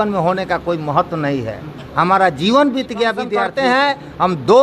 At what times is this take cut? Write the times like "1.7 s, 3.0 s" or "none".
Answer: 3.4 s

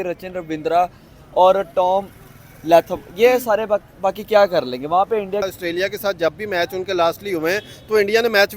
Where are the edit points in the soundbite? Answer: 5.4 s

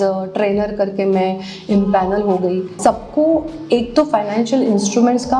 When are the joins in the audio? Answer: 2.7 s

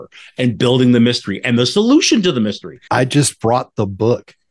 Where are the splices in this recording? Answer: 2.8 s

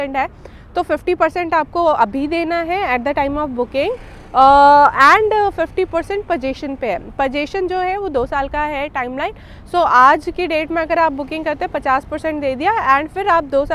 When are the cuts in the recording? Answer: none

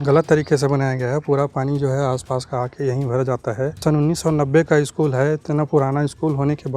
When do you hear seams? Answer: 3.8 s

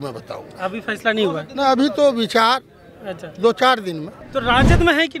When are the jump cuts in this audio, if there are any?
4.2 s

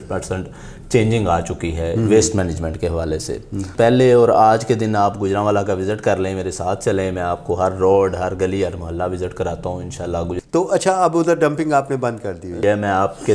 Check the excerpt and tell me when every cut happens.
3.7 s, 10.4 s, 12.6 s

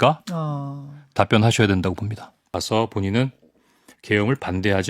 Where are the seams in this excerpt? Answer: 2.5 s

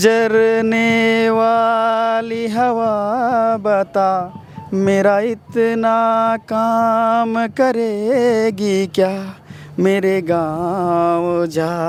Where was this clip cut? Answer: none

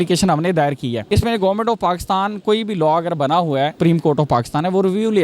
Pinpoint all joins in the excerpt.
1.0 s, 3.7 s

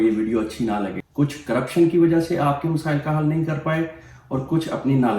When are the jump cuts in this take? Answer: 1.0 s

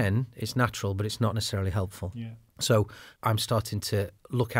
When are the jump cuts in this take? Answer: 2.0 s, 3.0 s

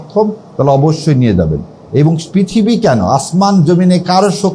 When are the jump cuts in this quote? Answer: none

